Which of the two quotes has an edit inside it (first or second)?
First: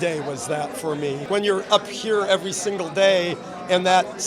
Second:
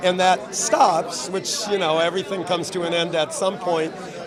first